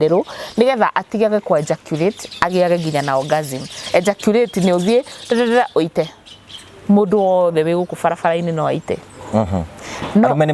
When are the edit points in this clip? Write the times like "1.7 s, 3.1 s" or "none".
3.8 s